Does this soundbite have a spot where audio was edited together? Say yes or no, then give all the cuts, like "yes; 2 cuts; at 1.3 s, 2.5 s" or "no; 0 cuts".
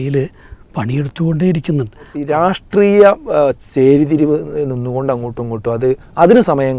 yes; 1 cut; at 2.3 s